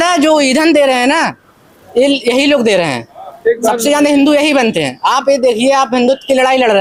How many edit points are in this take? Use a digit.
0